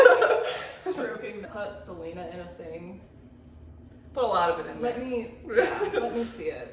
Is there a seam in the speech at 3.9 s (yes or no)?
no